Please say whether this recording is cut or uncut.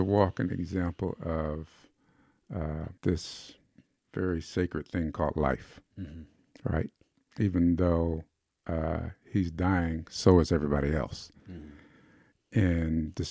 cut